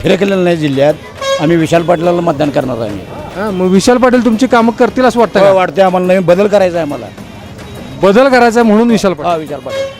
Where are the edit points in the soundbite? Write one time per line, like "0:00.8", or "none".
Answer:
none